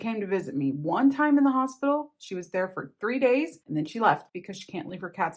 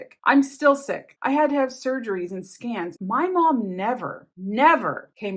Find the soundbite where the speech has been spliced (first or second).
second